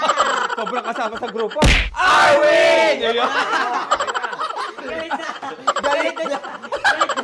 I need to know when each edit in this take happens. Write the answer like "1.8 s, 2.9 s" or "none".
none

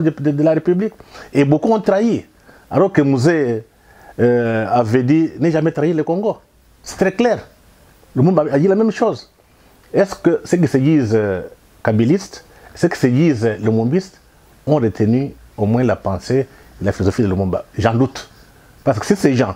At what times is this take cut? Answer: none

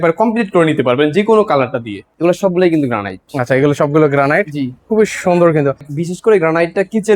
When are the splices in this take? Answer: 2.0 s, 5.9 s

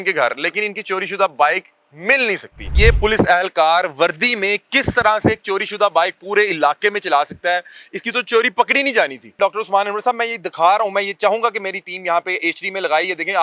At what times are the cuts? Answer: 2.7 s, 9.4 s

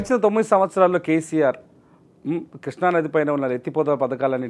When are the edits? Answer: none

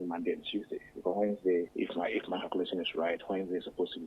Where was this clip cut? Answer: 1.7 s

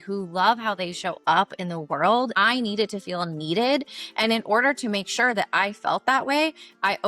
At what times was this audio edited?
2.3 s

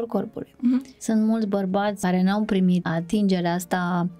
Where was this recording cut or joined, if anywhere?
0.9 s, 2.0 s, 2.8 s

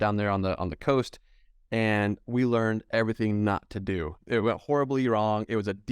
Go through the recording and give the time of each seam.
4.2 s

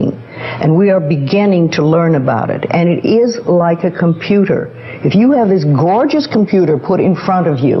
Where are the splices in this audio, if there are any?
none

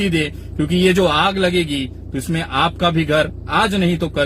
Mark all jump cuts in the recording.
none

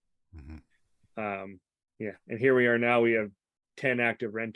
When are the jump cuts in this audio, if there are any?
none

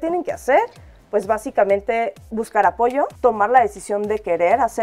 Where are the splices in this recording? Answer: 3.1 s

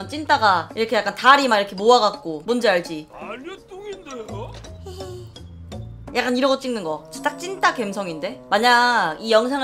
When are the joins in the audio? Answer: 3.1 s

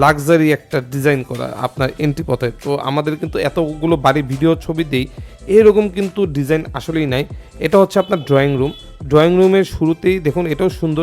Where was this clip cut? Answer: none

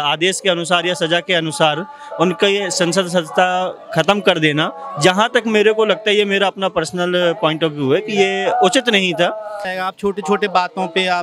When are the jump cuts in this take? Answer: 9.7 s

